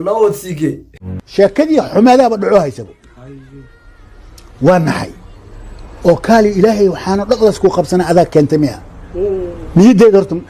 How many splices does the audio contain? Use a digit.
1